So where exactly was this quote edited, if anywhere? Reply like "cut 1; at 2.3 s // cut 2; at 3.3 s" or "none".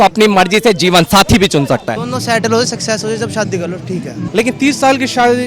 cut 1; at 1.9 s // cut 2; at 4.2 s